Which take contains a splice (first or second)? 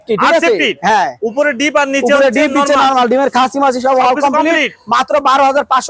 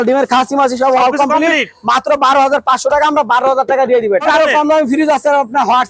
second